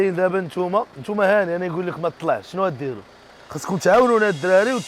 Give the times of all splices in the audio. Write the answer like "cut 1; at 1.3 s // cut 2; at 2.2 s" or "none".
cut 1; at 1.0 s